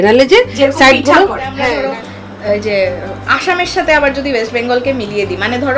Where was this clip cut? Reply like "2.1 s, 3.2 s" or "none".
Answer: 1.5 s